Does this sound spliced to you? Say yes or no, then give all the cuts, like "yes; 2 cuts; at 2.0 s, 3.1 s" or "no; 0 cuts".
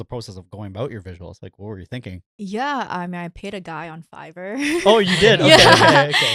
no; 0 cuts